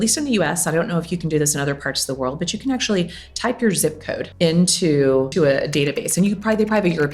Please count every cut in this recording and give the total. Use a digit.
2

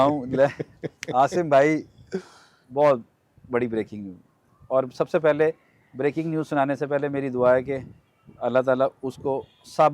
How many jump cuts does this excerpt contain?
0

